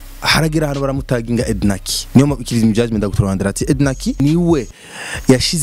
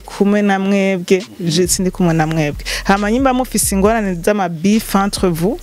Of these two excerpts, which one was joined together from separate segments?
first; 1 cut; at 4.2 s

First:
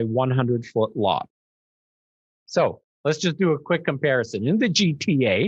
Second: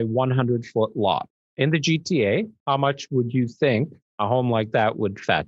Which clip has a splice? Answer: second; 3 cuts; at 1.4 s, 2.6 s, 4.0 s

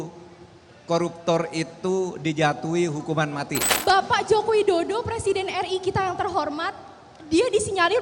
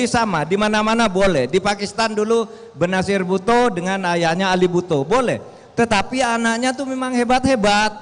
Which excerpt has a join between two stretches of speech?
first; 1 cut; at 3.7 s

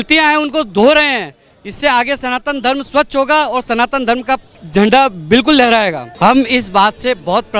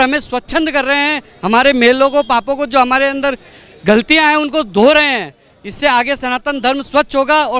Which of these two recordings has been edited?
first; 2 cuts; at 4.6 s, 6.1 s

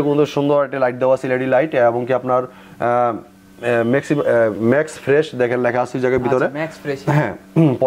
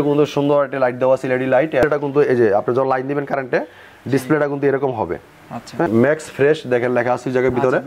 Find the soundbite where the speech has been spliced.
second; 2 cuts; at 1.8 s, 5.9 s

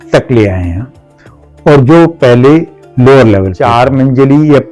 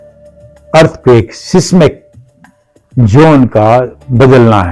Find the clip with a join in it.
first; 1 cut; at 3.5 s

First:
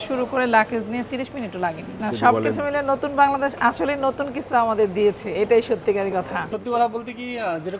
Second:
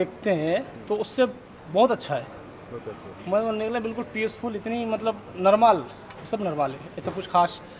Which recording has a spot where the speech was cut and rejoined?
first; 2 cuts; at 2.0 s, 6.5 s

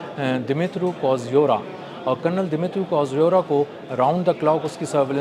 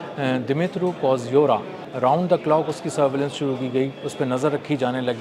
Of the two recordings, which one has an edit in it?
second; 1 cut; at 1.8 s

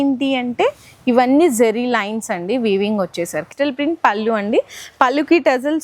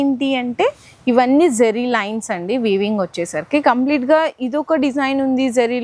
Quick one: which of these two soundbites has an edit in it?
first; 1 cut; at 3.5 s

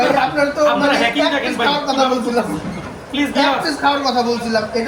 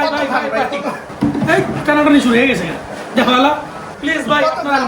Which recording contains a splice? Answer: second; 2 cuts; at 1.1 s, 3.8 s

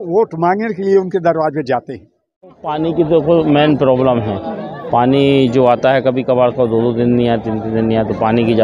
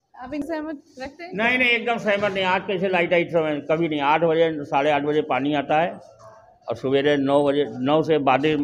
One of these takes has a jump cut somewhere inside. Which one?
first; 1 cut; at 2.5 s

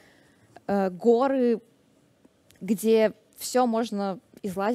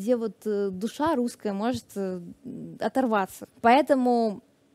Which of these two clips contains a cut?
second; 1 cut; at 3.4 s

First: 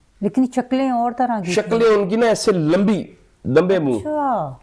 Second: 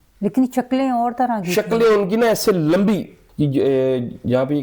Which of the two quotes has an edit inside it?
second; 1 cut; at 3.2 s

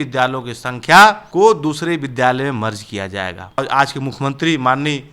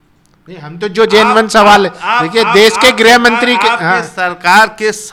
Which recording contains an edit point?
first; 2 cuts; at 1.2 s, 3.6 s

